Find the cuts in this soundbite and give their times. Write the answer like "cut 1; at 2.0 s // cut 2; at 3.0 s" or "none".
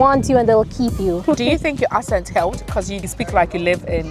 cut 1; at 1.2 s // cut 2; at 2.9 s

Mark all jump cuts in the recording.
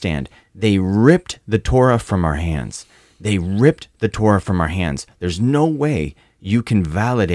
none

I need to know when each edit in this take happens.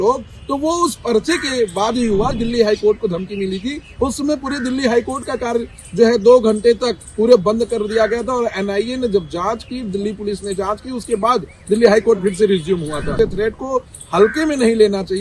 cut 1; at 2.4 s // cut 2; at 13.1 s

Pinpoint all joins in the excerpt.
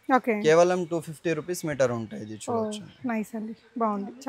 none

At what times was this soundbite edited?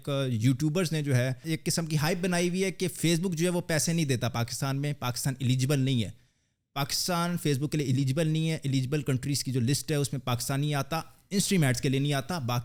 none

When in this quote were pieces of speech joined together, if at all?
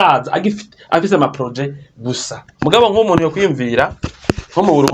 cut 1; at 2.4 s

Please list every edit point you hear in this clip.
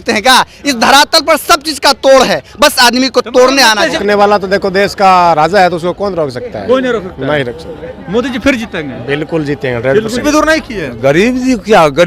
cut 1; at 4.0 s // cut 2; at 10.2 s

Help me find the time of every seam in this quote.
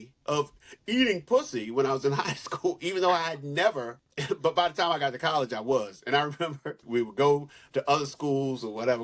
cut 1; at 6.8 s

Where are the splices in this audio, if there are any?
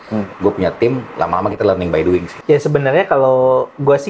cut 1; at 2.3 s

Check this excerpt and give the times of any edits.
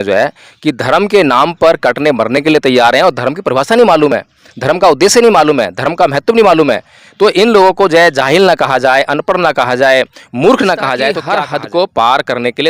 cut 1; at 11.2 s

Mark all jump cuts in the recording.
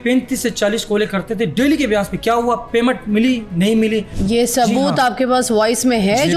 cut 1; at 4.1 s

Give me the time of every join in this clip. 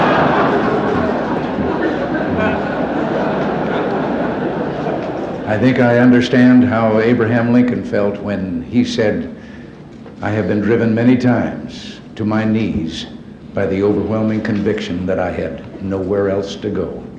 cut 1; at 1.3 s

